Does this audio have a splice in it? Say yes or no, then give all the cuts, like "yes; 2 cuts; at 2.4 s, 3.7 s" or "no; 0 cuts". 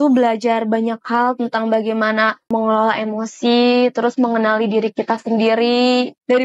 yes; 1 cut; at 2.5 s